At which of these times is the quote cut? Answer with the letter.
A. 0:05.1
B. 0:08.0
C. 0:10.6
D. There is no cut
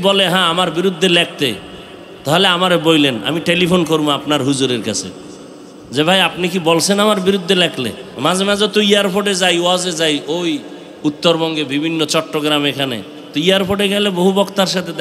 B